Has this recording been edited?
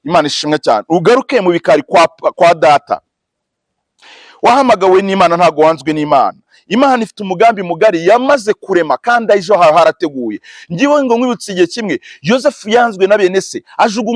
no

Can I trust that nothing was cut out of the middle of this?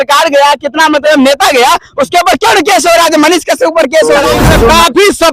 no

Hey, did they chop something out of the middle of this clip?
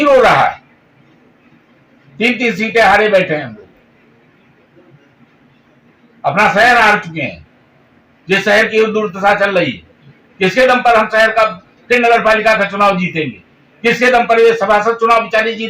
no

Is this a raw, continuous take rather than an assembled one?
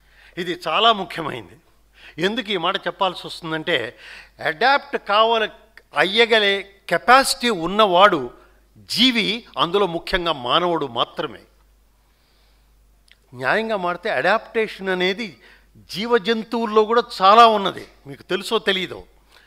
yes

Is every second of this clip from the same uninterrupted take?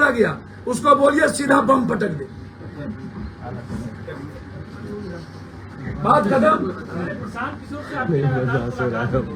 yes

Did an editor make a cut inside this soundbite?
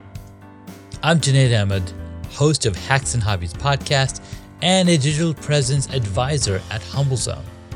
yes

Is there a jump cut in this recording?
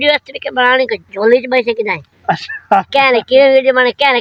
no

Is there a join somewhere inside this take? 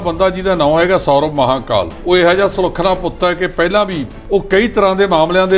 yes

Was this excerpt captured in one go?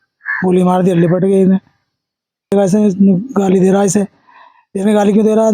no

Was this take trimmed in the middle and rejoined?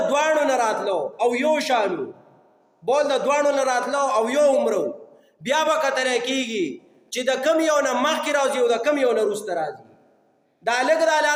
no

